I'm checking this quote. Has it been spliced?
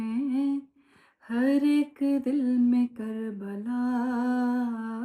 no; 0 cuts

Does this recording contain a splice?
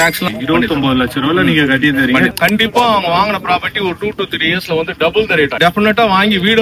yes; 2 cuts; at 2.3 s, 5.6 s

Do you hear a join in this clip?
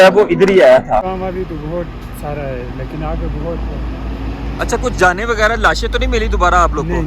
yes; 1 cut; at 1.2 s

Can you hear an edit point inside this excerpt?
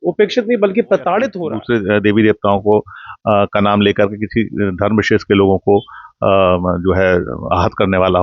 yes; 1 cut; at 1.3 s

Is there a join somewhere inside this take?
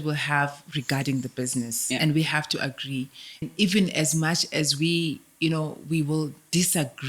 yes; 1 cut; at 3.4 s

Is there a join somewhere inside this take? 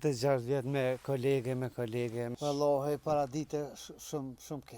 yes; 1 cut; at 2.3 s

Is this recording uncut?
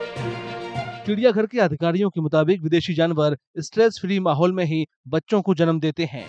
no; 1 cut; at 1.0 s

